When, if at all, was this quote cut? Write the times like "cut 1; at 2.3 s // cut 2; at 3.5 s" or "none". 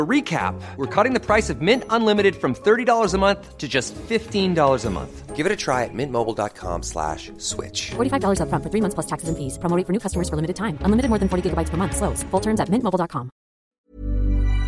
cut 1; at 13.7 s